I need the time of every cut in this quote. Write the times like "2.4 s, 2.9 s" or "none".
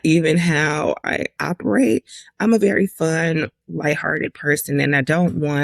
1.0 s